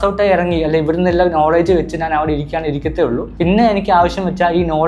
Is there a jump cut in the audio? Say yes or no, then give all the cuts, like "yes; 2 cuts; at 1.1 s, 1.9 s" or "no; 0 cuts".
no; 0 cuts